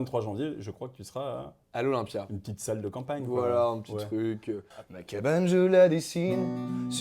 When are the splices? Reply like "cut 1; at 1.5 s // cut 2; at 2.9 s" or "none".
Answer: cut 1; at 4.7 s